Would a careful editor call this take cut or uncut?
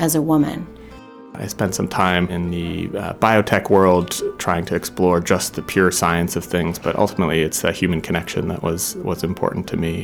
cut